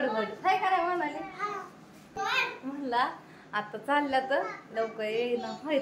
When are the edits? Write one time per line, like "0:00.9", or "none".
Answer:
0:02.0